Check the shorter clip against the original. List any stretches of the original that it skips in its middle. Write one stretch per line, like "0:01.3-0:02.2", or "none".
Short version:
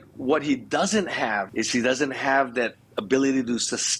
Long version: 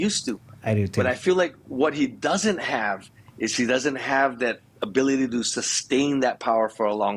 0:03.0-0:03.3